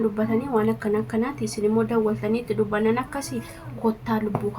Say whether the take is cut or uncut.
uncut